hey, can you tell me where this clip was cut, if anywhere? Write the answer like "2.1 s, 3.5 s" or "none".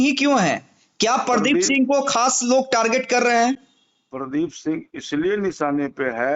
none